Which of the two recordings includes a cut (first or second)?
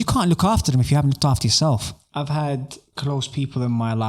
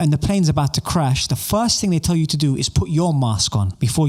first